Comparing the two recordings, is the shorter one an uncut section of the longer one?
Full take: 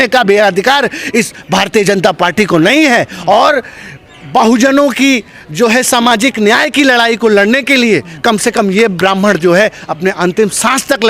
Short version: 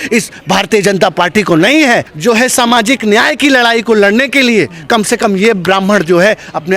no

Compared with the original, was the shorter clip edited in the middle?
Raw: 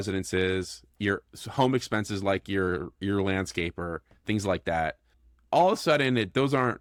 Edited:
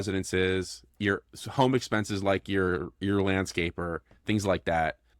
no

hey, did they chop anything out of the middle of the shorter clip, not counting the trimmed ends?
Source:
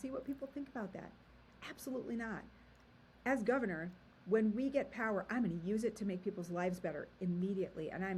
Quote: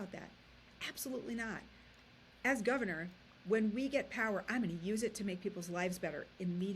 no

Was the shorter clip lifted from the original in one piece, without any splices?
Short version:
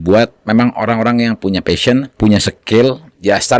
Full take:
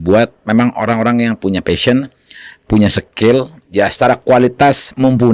no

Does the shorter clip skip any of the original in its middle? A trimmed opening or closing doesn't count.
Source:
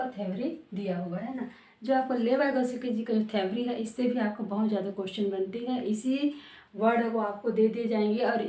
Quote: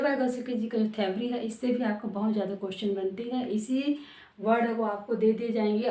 no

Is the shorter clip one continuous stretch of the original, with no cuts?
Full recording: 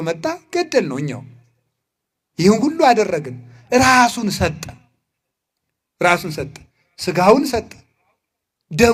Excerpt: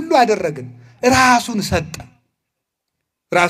yes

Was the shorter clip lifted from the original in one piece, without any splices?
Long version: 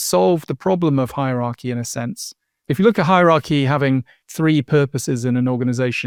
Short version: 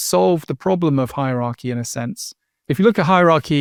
yes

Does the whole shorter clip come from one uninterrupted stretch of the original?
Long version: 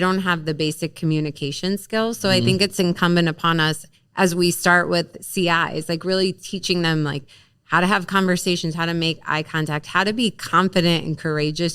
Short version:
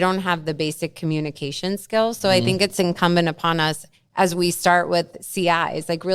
yes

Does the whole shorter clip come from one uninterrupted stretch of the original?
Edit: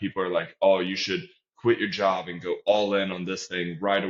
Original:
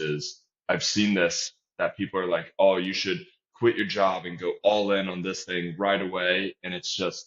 yes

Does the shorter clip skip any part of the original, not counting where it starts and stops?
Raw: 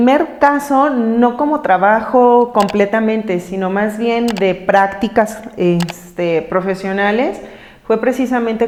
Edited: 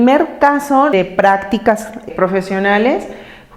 yes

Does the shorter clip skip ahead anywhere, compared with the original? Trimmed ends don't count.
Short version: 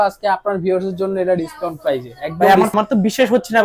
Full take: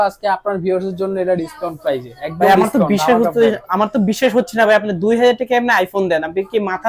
yes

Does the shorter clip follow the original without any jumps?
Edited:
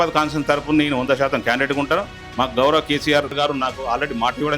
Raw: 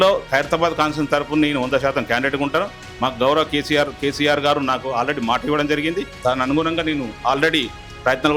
no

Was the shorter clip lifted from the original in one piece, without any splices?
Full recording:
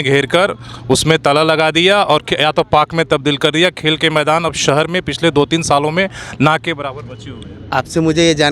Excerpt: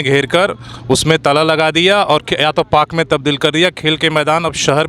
yes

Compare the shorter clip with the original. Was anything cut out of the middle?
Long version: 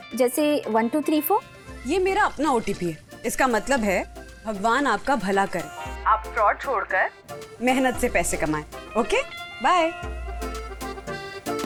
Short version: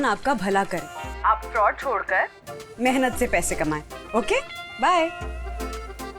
no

